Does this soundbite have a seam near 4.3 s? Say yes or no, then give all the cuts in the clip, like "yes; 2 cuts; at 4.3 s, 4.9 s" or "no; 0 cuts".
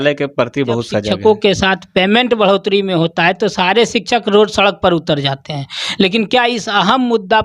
no; 1 cut; at 1.1 s